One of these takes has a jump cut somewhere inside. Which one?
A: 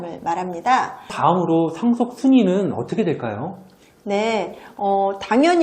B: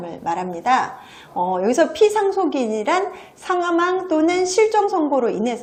A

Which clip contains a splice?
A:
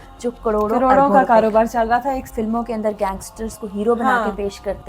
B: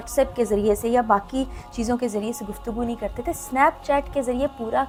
A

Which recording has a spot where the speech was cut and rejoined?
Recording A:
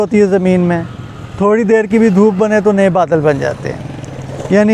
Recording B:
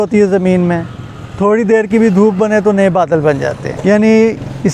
B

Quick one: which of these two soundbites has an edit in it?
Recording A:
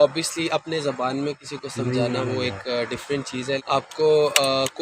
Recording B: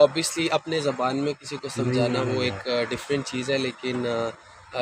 A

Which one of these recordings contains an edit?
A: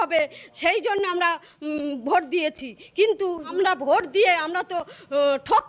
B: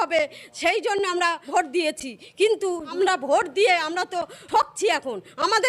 B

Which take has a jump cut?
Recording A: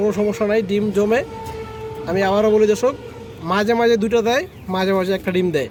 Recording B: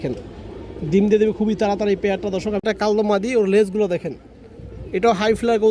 B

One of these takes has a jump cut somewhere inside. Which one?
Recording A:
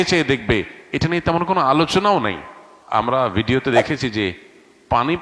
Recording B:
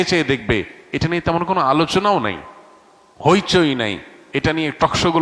A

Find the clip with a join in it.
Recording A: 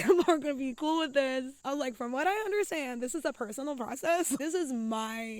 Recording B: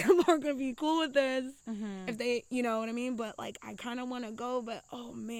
A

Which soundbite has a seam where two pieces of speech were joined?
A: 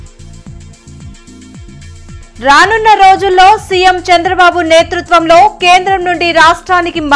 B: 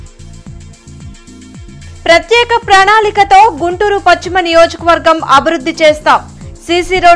B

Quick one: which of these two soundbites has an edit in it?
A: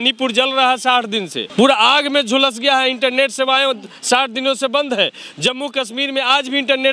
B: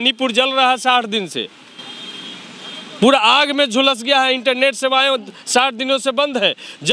A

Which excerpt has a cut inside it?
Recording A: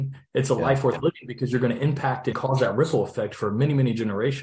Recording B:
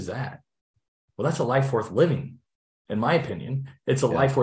A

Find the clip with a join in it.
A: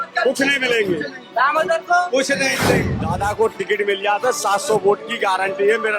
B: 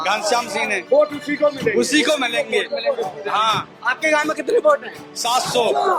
A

